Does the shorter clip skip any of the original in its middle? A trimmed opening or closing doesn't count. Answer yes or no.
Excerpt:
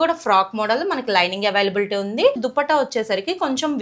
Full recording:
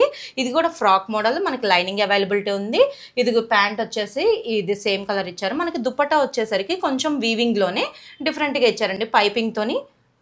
yes